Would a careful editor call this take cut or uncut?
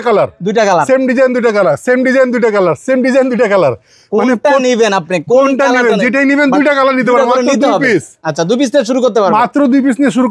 uncut